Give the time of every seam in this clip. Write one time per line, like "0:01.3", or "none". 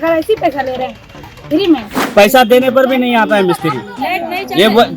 0:02.0